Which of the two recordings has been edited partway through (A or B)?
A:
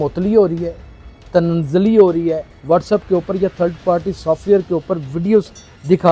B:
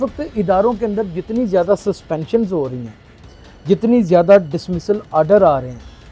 A